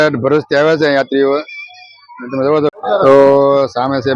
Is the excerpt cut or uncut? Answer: cut